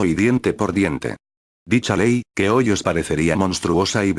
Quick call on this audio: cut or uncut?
cut